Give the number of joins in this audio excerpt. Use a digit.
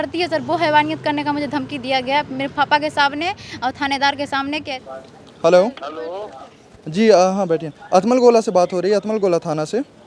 1